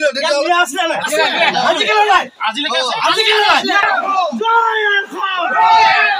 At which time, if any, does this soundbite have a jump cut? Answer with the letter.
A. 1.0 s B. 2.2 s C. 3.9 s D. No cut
C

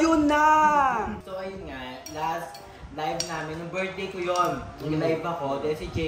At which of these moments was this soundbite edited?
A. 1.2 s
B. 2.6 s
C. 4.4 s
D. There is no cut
A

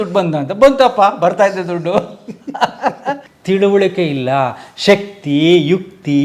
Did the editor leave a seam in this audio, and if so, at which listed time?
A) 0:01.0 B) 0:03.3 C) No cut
B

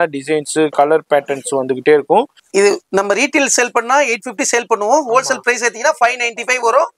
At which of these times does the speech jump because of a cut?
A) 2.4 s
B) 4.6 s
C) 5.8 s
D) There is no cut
A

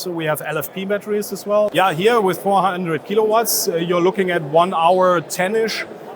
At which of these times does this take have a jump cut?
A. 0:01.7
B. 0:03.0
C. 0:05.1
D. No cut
A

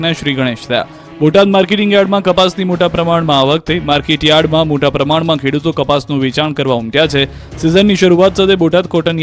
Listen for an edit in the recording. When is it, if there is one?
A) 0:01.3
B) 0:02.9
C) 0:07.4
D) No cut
A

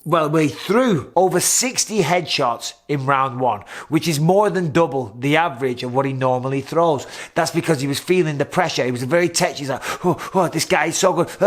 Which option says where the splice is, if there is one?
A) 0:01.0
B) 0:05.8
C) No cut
A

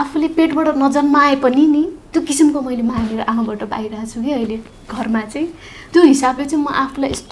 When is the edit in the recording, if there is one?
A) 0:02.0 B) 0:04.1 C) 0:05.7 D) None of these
C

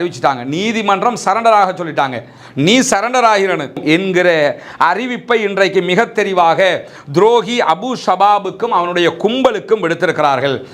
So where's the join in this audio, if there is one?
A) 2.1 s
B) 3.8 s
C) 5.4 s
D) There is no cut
B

